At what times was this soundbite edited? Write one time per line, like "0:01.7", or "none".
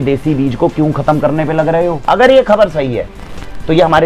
0:02.0